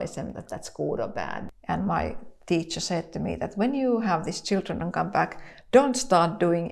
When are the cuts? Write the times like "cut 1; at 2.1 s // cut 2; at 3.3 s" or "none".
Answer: cut 1; at 1.4 s